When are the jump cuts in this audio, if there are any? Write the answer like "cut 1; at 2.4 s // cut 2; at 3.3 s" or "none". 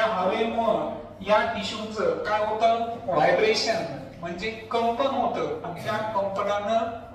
none